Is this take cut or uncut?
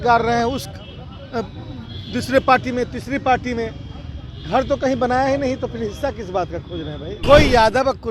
cut